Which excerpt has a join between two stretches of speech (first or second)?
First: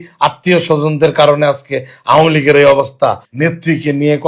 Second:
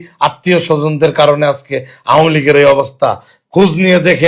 first